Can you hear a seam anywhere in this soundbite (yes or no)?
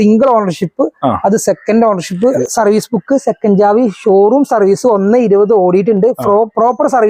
yes